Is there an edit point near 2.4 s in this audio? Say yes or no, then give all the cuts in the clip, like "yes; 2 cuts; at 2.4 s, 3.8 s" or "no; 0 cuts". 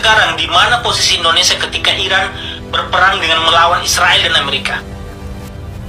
no; 1 cut; at 4.6 s